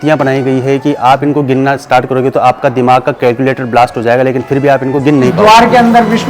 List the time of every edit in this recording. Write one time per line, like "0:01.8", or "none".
0:05.3